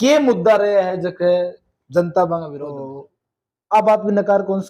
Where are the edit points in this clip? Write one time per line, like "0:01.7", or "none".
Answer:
0:02.8